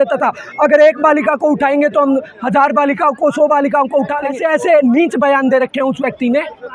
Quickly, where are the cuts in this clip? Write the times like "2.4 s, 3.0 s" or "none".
4.4 s